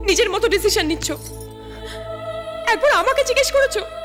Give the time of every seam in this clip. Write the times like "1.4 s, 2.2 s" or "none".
none